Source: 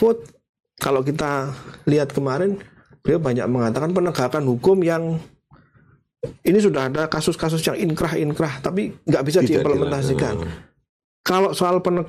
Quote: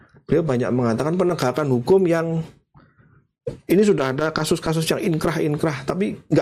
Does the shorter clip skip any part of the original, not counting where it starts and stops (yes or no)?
no